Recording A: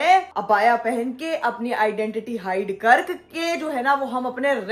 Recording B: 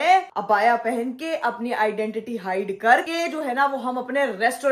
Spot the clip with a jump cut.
B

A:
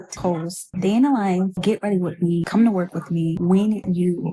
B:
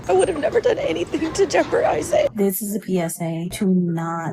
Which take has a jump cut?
B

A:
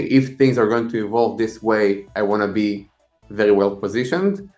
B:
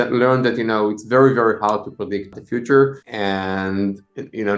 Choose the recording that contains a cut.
B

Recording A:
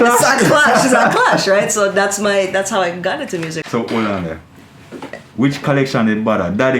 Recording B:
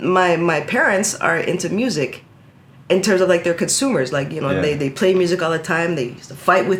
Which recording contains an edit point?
A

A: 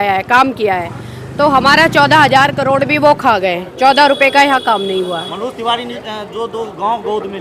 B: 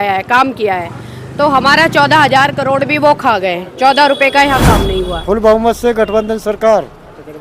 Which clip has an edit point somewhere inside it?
B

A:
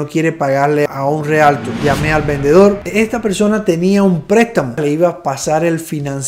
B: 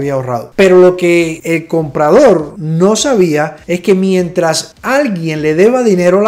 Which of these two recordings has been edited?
A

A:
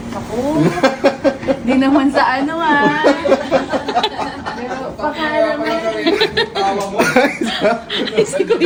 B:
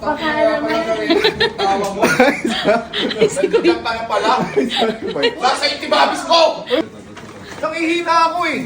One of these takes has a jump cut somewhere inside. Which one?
B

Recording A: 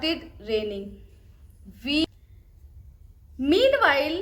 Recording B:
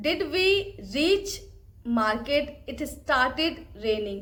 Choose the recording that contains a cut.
A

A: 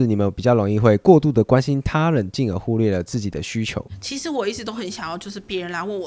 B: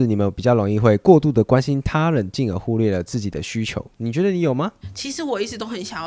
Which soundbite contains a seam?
A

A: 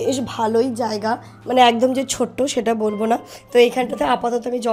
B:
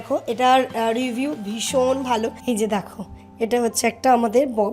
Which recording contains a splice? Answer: B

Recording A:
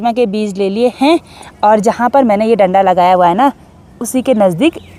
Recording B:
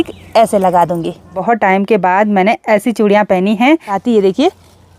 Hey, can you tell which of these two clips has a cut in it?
B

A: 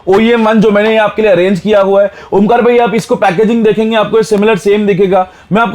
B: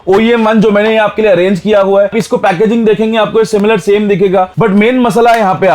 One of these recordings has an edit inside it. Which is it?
B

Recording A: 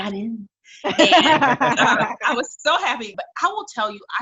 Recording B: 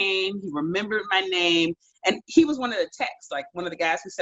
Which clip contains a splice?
A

